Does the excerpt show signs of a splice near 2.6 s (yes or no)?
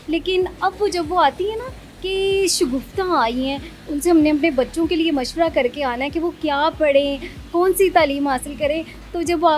no